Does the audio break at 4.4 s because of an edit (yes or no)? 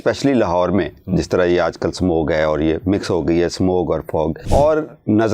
yes